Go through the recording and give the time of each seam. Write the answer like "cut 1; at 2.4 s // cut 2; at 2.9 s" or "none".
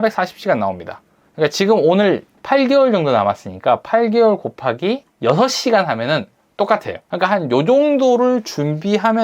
cut 1; at 2.3 s // cut 2; at 5.1 s // cut 3; at 7.0 s